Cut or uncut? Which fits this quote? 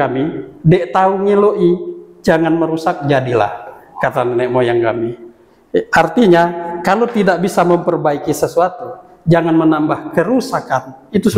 uncut